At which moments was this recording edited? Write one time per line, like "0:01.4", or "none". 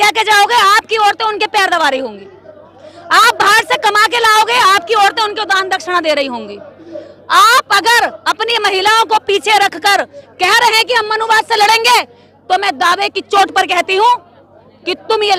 none